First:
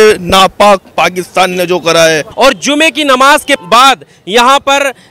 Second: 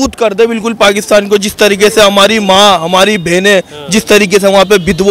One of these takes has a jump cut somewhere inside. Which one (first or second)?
first